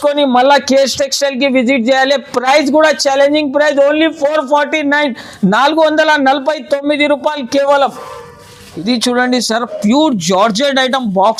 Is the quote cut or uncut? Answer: uncut